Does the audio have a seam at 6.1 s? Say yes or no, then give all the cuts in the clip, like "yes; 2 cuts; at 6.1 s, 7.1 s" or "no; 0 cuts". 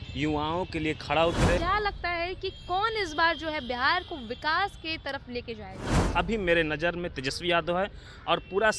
yes; 2 cuts; at 1.6 s, 6.1 s